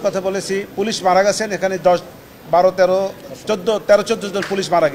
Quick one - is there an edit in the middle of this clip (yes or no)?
no